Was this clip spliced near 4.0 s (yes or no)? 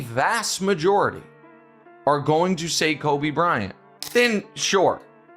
yes